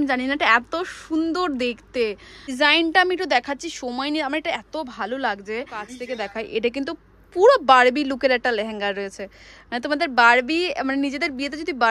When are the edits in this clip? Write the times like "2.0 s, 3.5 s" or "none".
2.5 s, 6.0 s